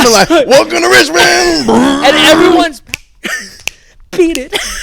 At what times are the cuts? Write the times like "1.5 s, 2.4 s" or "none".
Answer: 2.8 s